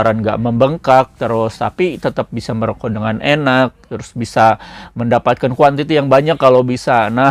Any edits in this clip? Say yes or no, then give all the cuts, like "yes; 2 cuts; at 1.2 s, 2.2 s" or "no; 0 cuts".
no; 0 cuts